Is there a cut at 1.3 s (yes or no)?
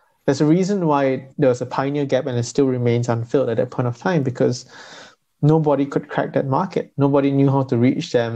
yes